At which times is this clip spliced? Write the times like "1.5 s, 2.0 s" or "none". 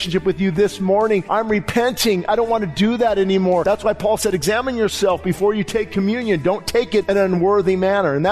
1.3 s, 3.6 s, 7.1 s